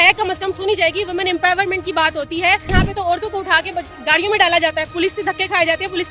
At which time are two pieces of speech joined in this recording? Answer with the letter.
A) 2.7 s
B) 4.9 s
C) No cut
A